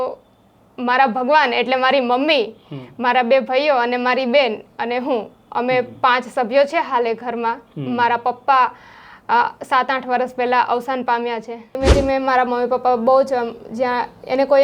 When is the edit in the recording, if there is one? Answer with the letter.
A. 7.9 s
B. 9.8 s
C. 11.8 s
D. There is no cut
C